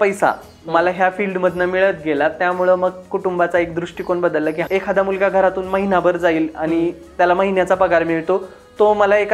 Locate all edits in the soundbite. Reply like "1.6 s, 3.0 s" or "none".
4.6 s